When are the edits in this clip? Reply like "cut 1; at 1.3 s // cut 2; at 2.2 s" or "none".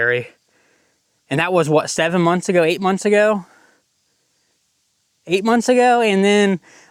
none